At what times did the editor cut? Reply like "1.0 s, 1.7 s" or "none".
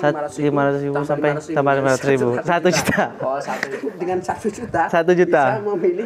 3.8 s

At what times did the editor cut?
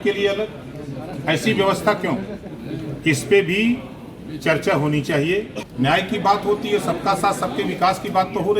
5.6 s

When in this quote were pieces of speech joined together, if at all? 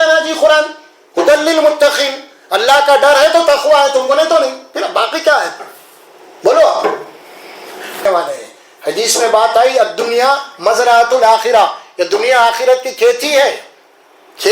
8.0 s

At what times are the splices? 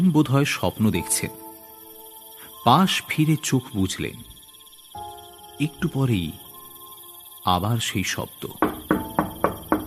8.4 s

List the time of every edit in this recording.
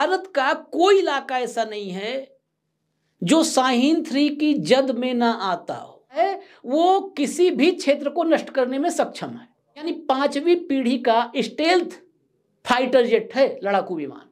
6.2 s, 9.9 s

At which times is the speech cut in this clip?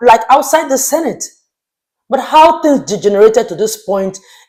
none

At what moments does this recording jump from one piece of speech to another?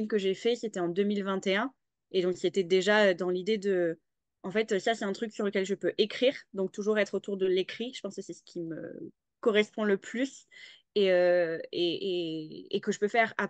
none

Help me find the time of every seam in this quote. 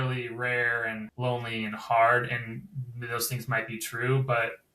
1.1 s

